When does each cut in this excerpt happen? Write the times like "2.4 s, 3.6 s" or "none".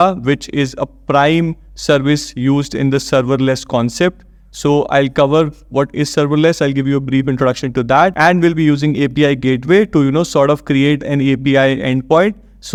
none